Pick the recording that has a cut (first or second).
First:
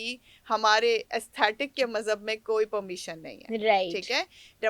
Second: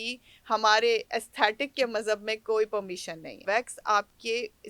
second